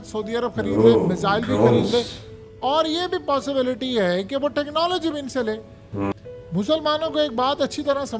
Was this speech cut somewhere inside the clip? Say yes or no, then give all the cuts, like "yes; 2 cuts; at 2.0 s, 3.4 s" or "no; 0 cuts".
yes; 1 cut; at 6.1 s